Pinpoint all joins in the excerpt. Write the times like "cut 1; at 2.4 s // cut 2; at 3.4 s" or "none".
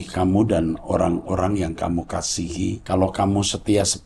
cut 1; at 2.8 s